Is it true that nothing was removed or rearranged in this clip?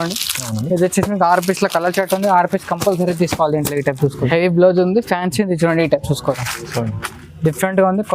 no; 1 cut; at 4.2 s

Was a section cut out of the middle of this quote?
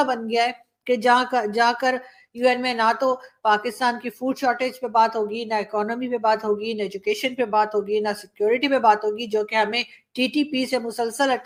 no; 0 cuts

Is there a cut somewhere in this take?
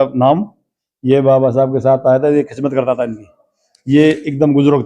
no; 0 cuts

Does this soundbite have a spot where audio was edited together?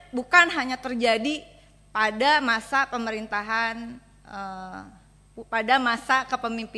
no; 0 cuts

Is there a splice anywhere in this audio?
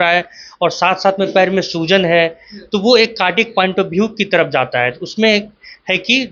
no; 0 cuts

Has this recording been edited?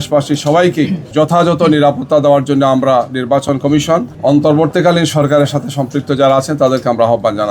yes; 2 cuts; at 1.0 s, 4.1 s

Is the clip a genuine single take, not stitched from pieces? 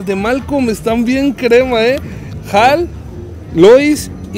yes; 0 cuts

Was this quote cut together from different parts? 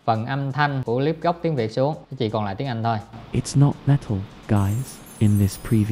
no; 0 cuts

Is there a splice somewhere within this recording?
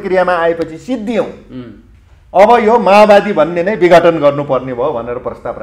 no; 0 cuts

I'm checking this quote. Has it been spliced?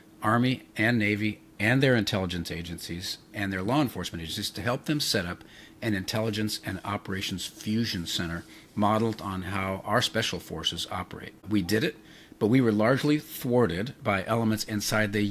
yes; 1 cut; at 11.4 s

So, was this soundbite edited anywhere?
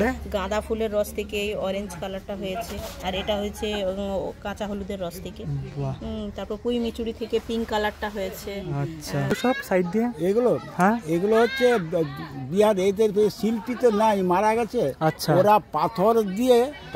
yes; 1 cut; at 9.3 s

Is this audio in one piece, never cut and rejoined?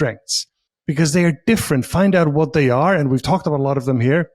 yes; 0 cuts

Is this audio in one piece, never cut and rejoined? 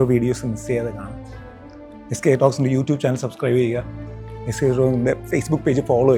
yes; 0 cuts

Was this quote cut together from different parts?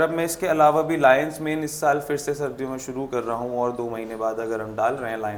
no; 0 cuts

